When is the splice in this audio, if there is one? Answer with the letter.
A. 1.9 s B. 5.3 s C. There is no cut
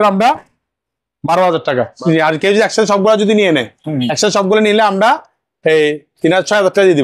A